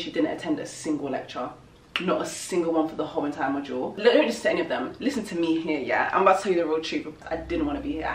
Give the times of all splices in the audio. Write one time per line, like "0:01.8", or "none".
0:03.9
0:07.0